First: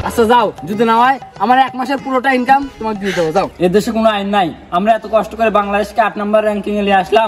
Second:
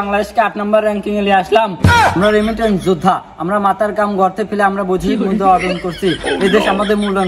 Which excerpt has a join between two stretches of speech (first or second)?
first